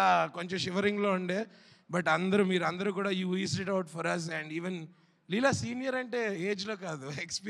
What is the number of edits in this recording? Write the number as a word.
zero